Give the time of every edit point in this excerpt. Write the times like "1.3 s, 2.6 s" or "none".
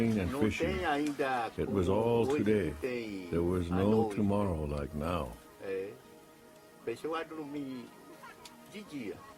none